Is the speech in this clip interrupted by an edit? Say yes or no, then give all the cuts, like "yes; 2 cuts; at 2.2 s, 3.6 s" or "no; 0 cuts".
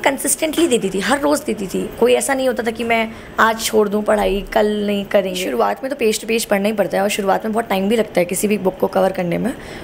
yes; 1 cut; at 5.5 s